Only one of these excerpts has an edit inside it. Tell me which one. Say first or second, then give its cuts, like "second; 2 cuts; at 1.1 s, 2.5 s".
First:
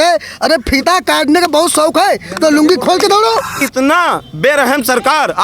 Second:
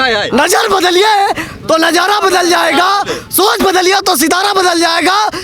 first; 1 cut; at 3.6 s